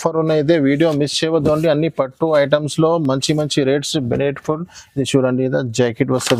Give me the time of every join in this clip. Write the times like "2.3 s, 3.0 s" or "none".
none